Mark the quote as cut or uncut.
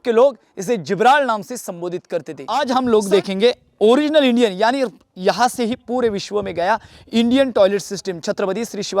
cut